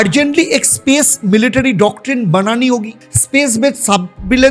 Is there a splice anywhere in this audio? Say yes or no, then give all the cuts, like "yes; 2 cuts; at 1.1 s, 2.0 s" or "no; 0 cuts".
no; 0 cuts